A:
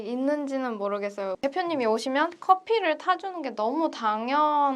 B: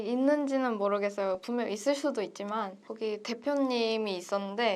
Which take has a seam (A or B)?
A